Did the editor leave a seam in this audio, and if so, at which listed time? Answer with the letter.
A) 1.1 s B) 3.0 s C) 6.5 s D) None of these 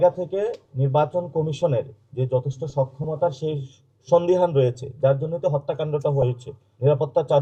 D